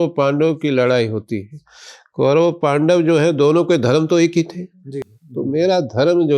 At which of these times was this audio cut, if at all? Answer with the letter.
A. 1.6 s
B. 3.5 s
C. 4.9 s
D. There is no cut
C